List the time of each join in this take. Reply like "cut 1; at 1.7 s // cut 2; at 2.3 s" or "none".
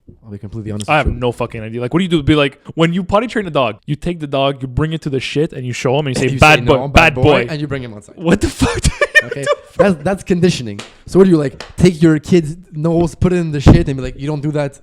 cut 1; at 2.6 s // cut 2; at 3.9 s